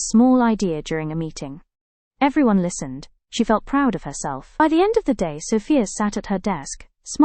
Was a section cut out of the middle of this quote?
yes; 1 cut; at 4.6 s

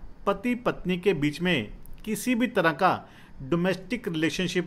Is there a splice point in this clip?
no; 0 cuts

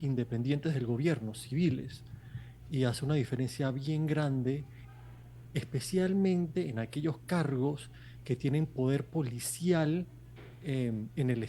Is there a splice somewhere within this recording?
no; 0 cuts

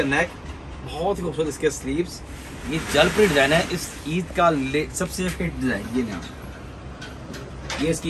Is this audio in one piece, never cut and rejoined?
yes; 0 cuts

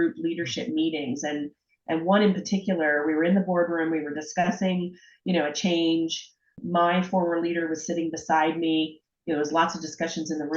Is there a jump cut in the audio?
yes; 1 cut; at 6.5 s

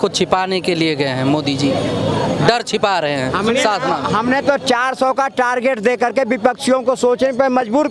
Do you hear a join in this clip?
no; 0 cuts

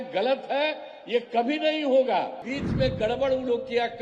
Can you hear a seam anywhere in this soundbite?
yes; 1 cut; at 2.5 s

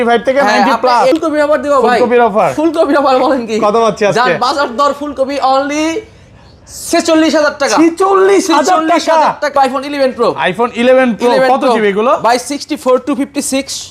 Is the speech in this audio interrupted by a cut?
yes; 2 cuts; at 1.1 s, 9.5 s

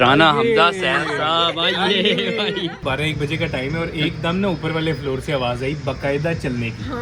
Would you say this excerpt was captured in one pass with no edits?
no; 1 cut; at 2.8 s

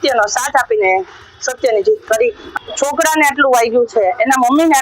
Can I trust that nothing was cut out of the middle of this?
no; 1 cut; at 2.5 s

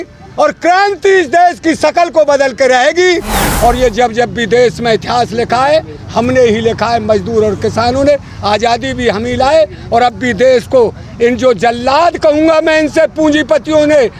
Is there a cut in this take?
yes; 1 cut; at 3.4 s

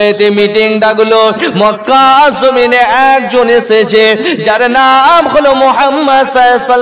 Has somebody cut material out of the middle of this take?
no; 0 cuts

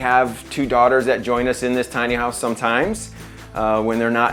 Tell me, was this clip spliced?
no; 0 cuts

